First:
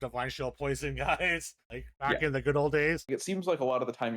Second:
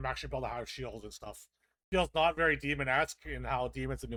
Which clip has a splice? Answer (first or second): first